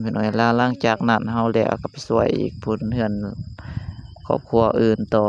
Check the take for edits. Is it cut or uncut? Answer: uncut